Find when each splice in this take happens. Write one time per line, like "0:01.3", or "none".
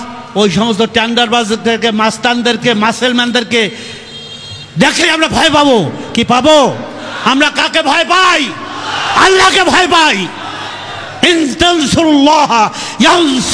none